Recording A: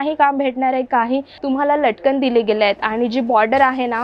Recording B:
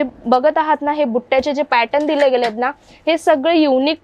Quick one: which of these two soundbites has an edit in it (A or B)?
A